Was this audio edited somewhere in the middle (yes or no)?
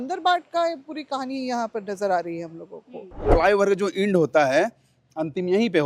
yes